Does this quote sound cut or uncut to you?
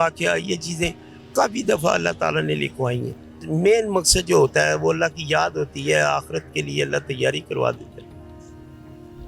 uncut